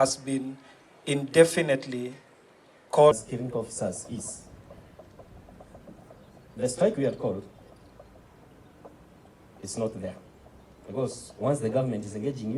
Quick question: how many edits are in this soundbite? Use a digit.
1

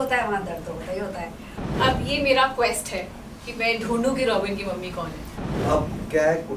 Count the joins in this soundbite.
2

